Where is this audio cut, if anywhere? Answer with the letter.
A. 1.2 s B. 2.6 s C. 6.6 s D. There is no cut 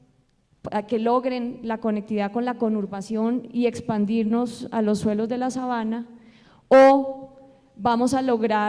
D